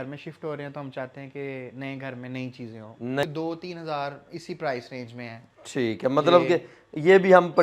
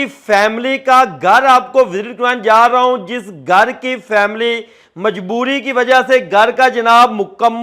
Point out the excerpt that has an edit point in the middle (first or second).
first